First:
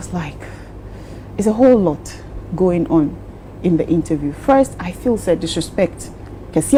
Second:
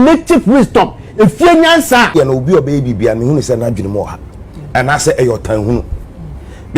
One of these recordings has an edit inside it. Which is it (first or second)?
second